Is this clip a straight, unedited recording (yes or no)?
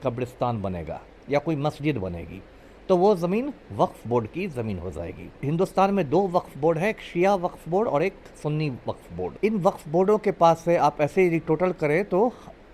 no